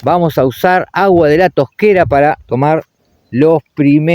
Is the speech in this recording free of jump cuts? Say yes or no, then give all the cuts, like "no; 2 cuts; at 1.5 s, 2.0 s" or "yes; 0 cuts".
yes; 0 cuts